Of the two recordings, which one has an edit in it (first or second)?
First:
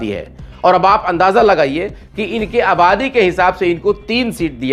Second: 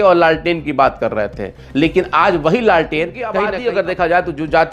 second